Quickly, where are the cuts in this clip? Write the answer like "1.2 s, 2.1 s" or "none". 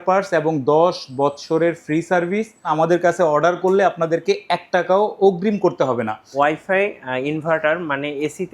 2.7 s, 6.3 s

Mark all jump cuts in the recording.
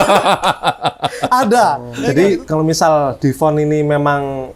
1.9 s

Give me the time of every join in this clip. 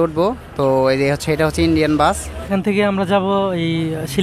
2.5 s

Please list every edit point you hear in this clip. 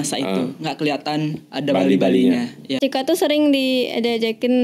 2.7 s

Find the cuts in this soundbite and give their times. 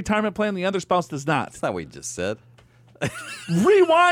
none

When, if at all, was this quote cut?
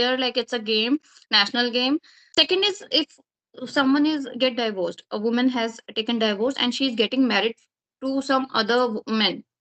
2.2 s

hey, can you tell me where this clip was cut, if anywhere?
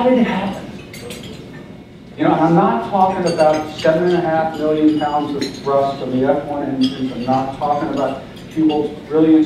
3.5 s

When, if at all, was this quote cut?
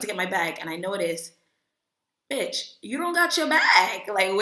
none

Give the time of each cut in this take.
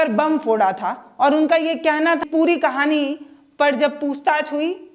2.2 s

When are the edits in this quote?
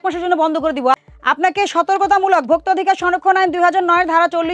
0.9 s

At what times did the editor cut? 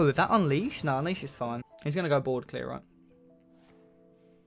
1.7 s

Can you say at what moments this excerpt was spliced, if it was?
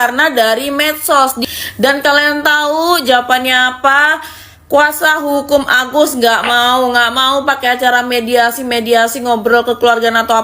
1.4 s

